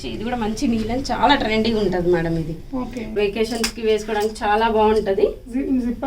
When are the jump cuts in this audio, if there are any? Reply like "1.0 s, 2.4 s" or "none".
3.1 s